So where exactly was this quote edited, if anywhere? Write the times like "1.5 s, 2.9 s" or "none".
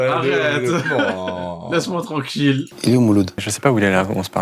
2.6 s, 3.5 s